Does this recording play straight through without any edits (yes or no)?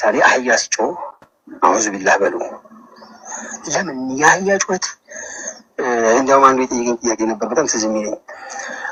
yes